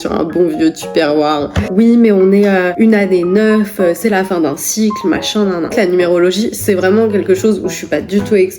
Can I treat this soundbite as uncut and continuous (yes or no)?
no